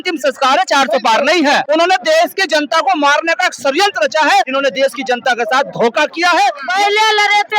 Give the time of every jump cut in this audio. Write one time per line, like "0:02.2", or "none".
0:01.7
0:04.5
0:06.6